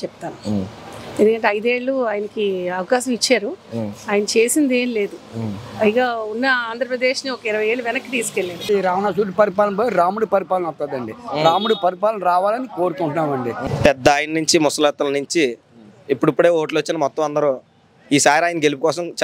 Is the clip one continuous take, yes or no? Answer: no